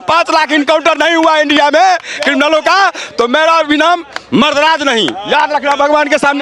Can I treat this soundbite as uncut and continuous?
yes; 0 cuts

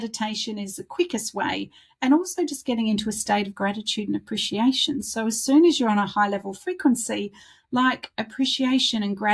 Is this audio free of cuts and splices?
yes; 0 cuts

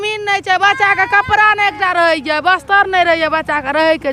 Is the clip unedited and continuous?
yes; 0 cuts

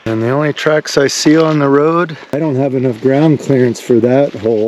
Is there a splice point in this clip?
yes; 1 cut; at 2.4 s

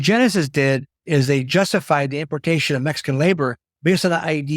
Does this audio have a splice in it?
yes; 2 cuts; at 0.9 s, 3.7 s

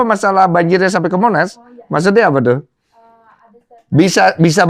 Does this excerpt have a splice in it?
no; 0 cuts

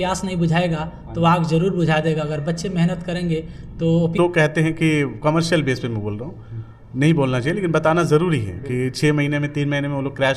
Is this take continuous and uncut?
no; 1 cut; at 4.1 s

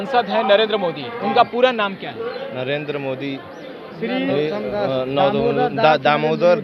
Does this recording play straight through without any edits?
yes; 0 cuts

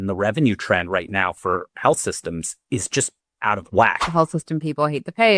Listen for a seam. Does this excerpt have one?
yes; 1 cut; at 4.0 s

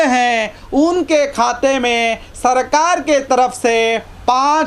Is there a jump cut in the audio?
no; 0 cuts

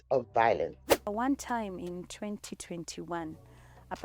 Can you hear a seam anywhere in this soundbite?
yes; 1 cut; at 1.1 s

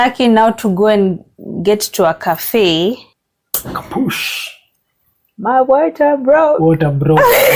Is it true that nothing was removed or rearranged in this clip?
no; 1 cut; at 3.8 s

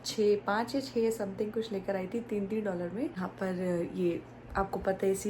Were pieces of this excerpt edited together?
yes; 1 cut; at 3.2 s

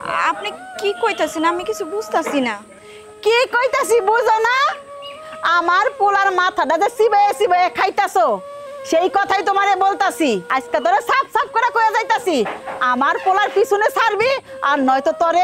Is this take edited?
yes; 1 cut; at 10.4 s

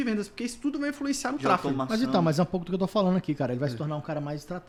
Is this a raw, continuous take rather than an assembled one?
yes; 0 cuts

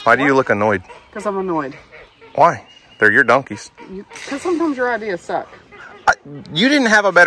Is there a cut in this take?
no; 0 cuts

